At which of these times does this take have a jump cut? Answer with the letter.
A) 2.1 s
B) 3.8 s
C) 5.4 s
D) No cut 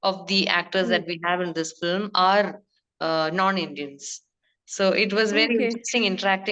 D